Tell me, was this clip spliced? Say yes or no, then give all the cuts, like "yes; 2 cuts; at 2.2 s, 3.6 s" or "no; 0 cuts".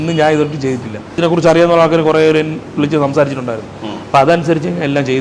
yes; 1 cut; at 1.2 s